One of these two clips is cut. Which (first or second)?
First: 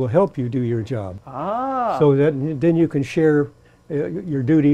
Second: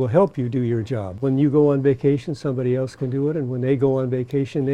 second